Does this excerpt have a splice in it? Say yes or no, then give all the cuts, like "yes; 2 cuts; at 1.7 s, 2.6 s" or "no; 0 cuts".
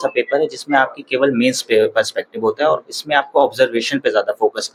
no; 0 cuts